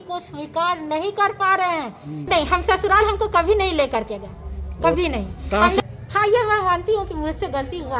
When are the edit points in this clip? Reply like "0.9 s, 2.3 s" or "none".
2.1 s, 5.8 s